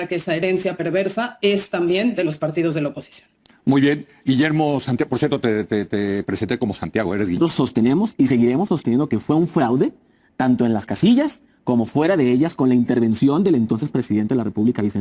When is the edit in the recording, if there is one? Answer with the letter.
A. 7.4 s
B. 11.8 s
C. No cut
A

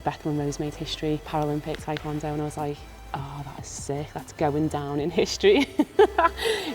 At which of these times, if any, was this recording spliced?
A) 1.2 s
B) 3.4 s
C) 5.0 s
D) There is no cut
A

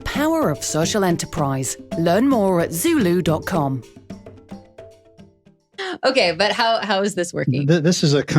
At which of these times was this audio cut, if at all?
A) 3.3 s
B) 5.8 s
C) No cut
B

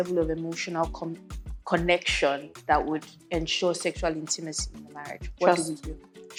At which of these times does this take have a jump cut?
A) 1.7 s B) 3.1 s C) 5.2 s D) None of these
D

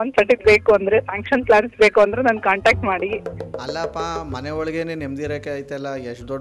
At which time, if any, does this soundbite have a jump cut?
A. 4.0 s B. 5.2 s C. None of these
C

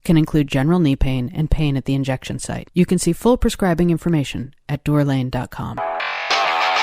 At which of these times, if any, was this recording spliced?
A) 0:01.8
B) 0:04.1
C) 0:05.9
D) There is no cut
C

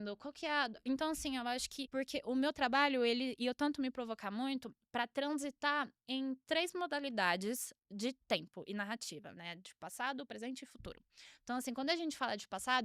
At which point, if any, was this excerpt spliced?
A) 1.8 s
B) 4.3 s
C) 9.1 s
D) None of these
A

